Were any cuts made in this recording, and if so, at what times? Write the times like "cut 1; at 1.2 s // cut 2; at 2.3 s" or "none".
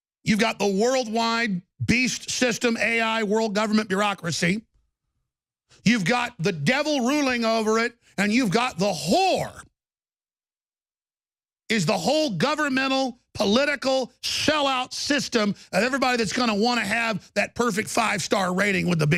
none